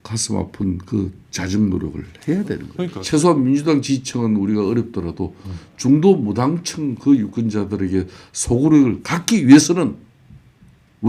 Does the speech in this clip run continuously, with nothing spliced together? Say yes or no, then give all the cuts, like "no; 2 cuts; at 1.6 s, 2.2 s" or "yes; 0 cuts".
no; 1 cut; at 2.9 s